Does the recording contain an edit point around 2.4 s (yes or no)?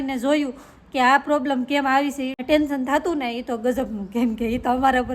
yes